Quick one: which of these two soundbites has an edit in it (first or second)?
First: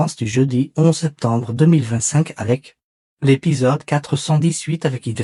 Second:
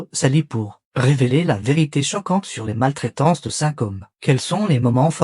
second